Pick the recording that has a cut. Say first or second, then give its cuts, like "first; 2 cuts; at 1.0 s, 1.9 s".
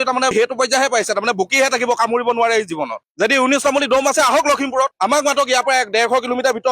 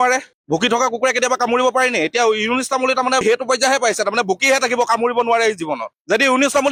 first; 1 cut; at 4.9 s